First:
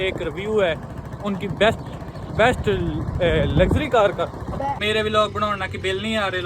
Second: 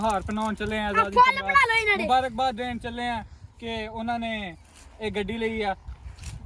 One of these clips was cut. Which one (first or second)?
first